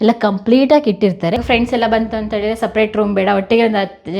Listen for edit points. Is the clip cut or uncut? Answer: cut